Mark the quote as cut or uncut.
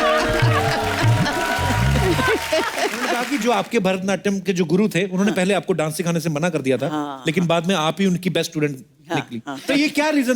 cut